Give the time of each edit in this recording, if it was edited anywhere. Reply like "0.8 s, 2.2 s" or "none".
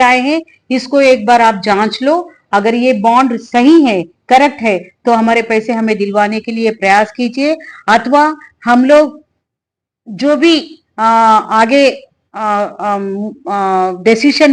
none